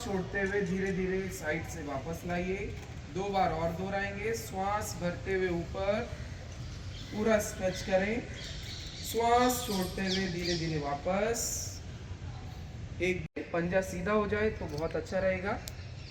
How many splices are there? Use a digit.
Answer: 0